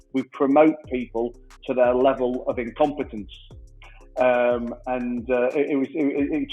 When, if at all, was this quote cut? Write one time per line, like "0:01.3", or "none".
none